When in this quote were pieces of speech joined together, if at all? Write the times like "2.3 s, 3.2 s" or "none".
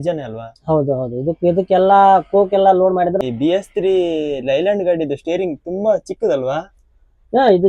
3.2 s

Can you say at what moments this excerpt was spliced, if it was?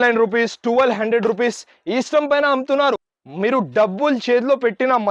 3.2 s

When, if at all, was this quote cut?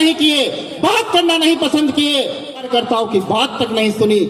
2.7 s

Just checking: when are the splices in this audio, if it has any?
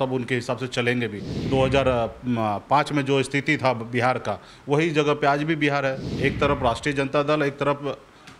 1.3 s, 6.1 s

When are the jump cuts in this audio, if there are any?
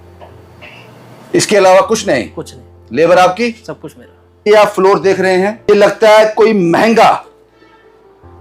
4.5 s, 5.7 s

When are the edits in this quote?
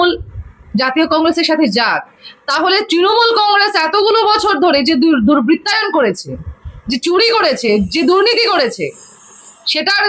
none

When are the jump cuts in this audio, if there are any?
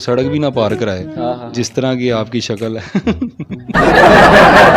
3.7 s

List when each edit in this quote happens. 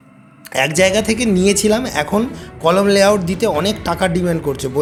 none

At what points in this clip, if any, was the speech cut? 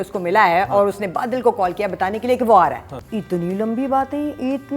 2.9 s

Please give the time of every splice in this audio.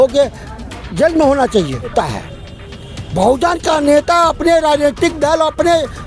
1.9 s

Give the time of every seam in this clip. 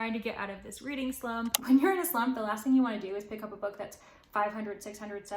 1.6 s

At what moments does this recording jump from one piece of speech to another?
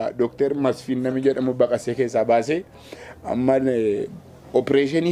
none

